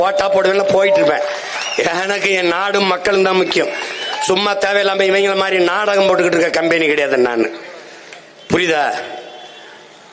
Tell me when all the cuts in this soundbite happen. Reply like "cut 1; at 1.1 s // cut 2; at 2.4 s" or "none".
none